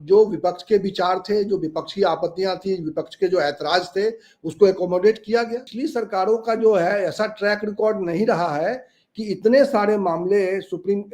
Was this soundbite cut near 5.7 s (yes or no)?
yes